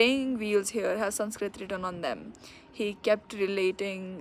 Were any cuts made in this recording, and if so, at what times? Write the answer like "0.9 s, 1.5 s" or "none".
none